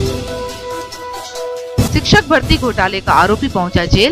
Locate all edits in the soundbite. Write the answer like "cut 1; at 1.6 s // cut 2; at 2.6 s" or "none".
none